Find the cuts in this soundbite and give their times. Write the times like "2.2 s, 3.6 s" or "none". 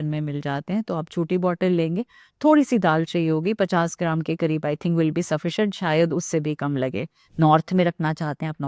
7.3 s